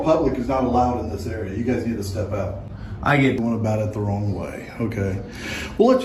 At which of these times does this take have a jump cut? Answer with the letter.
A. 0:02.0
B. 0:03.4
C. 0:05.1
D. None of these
B